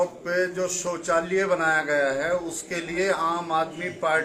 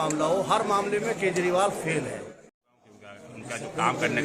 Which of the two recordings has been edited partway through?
second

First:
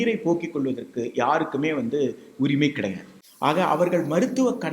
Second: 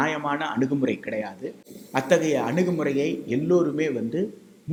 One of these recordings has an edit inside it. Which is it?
first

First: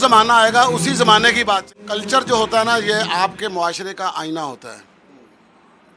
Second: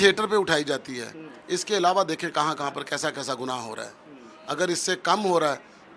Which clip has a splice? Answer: first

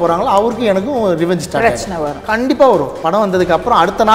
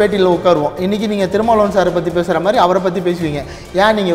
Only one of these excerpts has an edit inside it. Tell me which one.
first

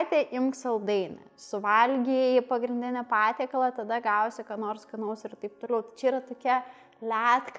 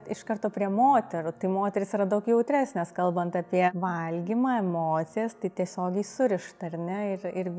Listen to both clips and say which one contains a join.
second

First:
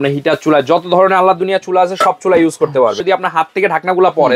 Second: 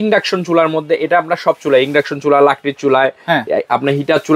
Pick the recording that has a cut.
first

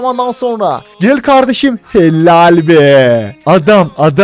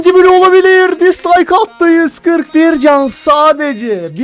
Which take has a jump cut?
first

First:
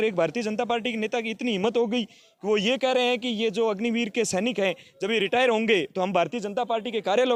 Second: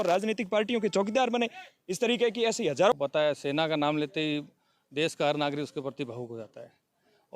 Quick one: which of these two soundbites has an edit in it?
second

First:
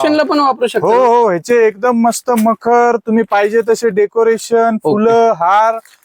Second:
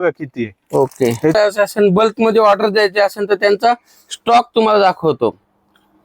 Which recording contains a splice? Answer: second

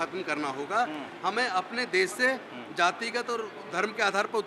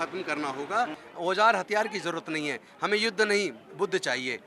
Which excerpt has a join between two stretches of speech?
second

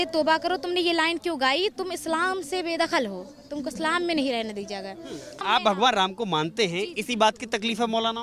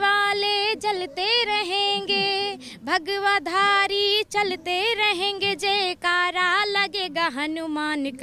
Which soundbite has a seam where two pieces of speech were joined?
first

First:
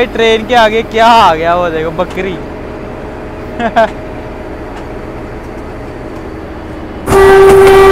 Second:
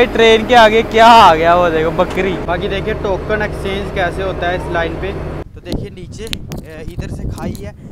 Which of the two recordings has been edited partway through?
second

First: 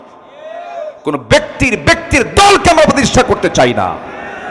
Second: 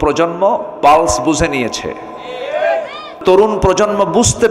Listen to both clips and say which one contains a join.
second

